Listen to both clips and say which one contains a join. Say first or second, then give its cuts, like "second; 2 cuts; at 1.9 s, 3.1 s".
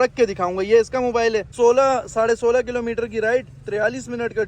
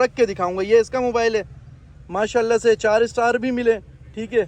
first; 1 cut; at 1.5 s